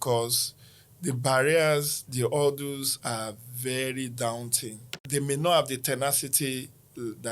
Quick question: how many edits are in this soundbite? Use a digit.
1